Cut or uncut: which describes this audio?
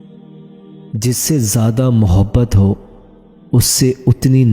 uncut